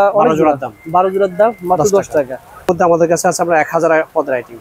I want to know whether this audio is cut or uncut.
cut